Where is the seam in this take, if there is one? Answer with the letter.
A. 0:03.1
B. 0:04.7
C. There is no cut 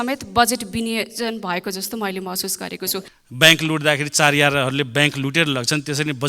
A